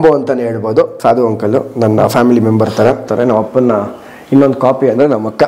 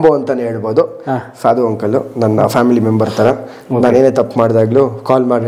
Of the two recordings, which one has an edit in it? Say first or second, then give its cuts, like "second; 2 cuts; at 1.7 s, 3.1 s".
first; 2 cuts; at 0.9 s, 3.1 s